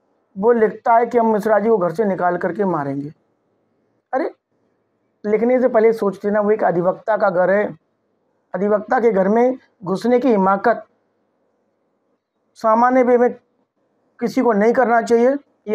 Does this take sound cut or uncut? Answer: uncut